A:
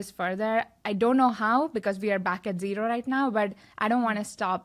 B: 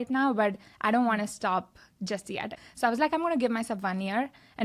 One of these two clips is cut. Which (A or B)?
B